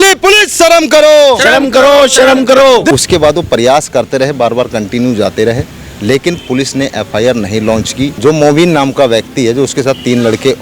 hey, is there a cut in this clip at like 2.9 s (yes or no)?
yes